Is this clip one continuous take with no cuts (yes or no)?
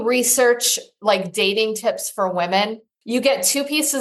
no